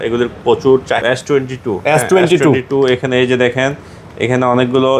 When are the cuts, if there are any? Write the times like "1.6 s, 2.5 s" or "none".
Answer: 1.0 s